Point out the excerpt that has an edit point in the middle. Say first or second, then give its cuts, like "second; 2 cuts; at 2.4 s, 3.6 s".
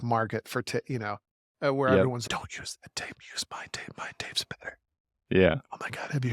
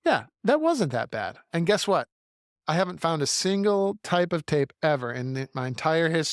first; 1 cut; at 2.2 s